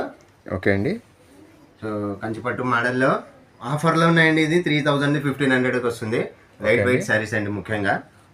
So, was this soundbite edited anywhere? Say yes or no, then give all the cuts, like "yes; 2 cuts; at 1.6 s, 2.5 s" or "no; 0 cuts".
no; 0 cuts